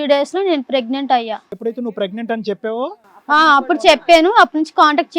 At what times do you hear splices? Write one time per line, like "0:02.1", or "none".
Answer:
0:01.5